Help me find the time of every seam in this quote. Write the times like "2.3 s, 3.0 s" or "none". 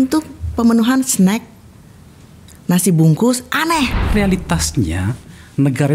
4.0 s